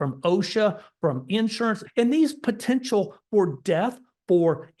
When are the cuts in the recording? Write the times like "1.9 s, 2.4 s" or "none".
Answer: 1.8 s

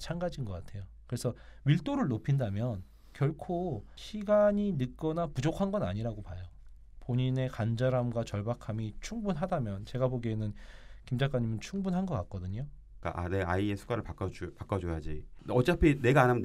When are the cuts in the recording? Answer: 3.9 s, 12.9 s, 15.3 s

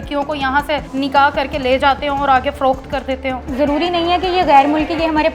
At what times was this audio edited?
0.9 s, 3.4 s

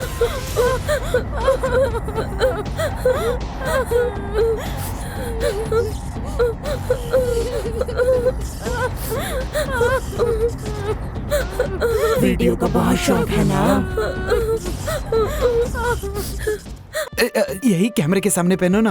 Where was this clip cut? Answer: 17.1 s

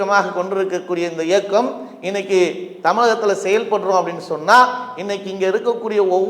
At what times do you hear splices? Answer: none

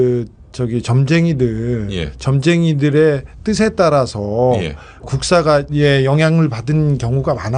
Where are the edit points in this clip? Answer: 4.7 s

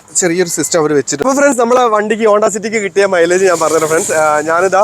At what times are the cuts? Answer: 1.1 s

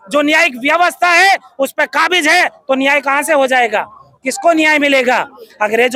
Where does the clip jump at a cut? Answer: none

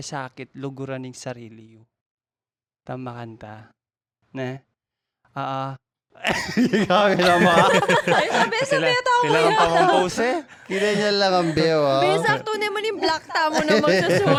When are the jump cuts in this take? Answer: none

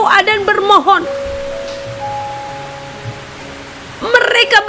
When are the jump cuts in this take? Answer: none

